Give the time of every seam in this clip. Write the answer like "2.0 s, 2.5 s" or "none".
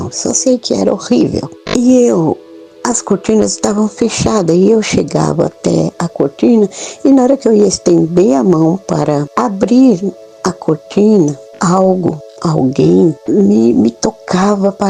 1.6 s, 9.3 s, 11.5 s, 12.3 s, 13.2 s